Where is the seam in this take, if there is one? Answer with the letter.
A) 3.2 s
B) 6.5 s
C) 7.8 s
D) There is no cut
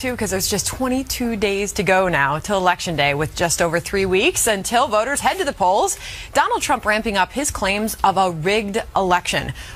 A